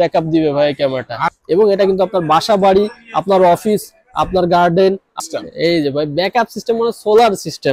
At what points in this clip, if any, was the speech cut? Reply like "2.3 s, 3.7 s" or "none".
1.2 s, 5.2 s